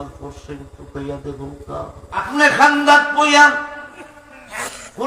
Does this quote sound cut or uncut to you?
cut